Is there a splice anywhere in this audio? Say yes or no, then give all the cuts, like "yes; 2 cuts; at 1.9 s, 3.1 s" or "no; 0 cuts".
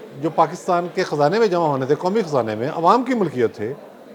no; 0 cuts